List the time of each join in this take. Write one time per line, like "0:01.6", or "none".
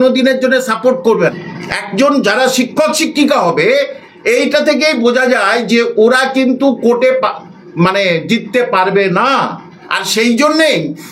none